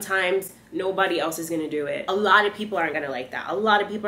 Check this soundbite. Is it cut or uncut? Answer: cut